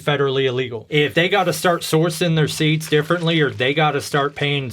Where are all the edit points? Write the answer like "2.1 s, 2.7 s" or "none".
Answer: 1.1 s